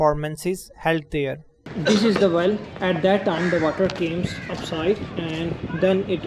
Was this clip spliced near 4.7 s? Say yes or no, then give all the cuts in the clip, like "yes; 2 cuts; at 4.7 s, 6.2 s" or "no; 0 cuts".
no; 1 cut; at 1.7 s